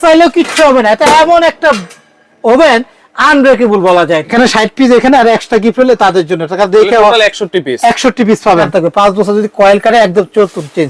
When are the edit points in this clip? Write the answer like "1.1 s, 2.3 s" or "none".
4.3 s, 8.7 s